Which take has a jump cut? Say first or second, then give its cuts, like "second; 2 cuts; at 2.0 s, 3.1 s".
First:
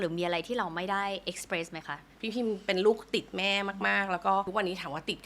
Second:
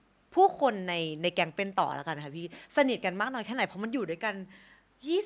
first; 2 cuts; at 2.1 s, 4.5 s